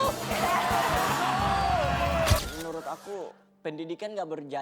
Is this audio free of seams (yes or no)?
no